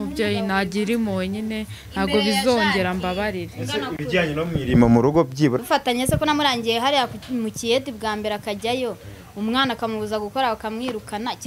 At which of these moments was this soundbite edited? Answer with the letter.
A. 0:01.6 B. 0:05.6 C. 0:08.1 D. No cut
B